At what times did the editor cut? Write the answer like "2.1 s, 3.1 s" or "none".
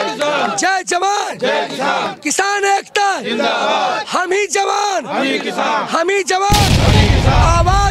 none